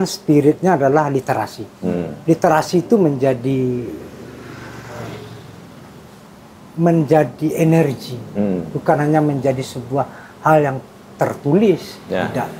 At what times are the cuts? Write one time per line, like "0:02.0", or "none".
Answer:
none